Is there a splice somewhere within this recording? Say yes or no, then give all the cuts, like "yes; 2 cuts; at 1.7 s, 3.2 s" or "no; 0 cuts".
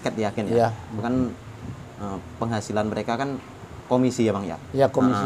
no; 0 cuts